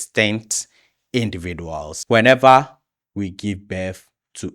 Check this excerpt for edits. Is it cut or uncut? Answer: cut